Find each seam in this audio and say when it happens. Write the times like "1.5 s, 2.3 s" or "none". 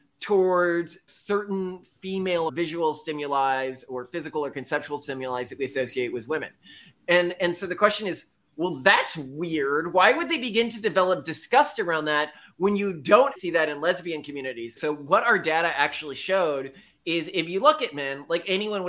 13.4 s, 14.8 s